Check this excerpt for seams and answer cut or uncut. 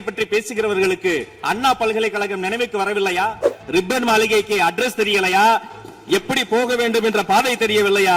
cut